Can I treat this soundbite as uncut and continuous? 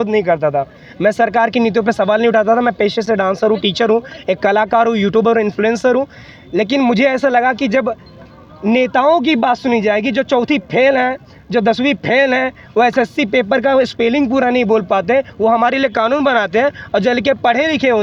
yes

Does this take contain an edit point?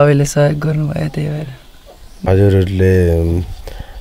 yes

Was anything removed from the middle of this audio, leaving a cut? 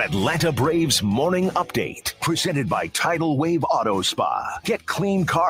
yes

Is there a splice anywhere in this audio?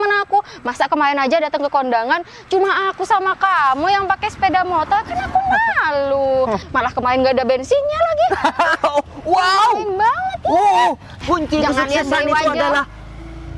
yes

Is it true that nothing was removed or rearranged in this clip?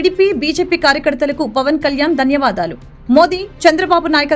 yes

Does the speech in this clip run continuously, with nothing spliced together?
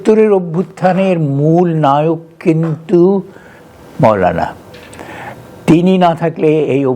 yes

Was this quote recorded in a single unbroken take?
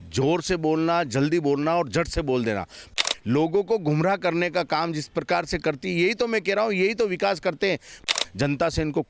no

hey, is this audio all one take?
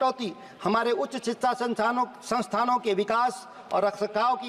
yes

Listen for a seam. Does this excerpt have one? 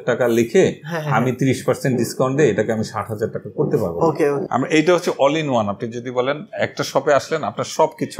yes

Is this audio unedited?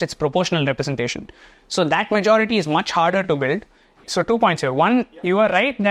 yes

